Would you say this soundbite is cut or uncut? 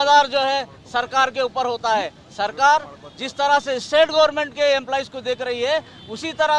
uncut